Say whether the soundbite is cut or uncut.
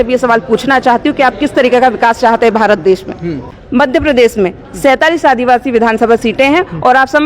cut